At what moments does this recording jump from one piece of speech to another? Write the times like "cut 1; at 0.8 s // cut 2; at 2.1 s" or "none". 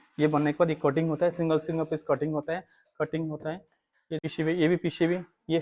cut 1; at 4.3 s